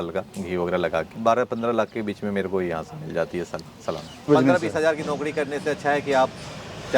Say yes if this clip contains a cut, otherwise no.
yes